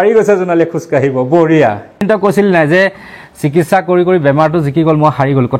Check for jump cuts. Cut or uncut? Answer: cut